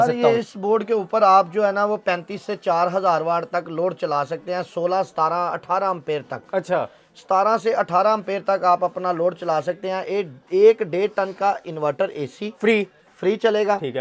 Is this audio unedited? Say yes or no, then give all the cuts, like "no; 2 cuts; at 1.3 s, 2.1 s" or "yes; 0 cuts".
yes; 0 cuts